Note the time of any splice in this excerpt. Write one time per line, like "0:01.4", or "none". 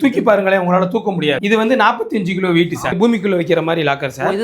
0:01.4
0:03.0